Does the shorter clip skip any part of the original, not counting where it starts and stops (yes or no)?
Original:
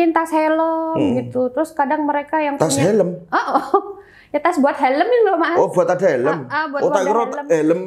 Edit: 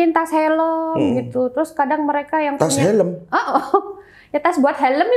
no